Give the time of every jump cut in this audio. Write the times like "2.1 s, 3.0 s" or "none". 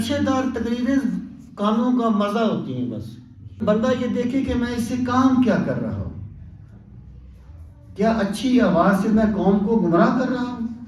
3.6 s